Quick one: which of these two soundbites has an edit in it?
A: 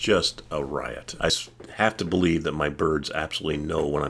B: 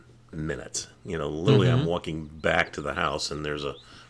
A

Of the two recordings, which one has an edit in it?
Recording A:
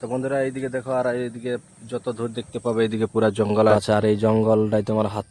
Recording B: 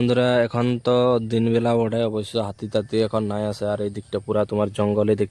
A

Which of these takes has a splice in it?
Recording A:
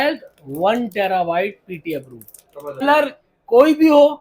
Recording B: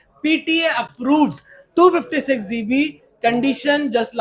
A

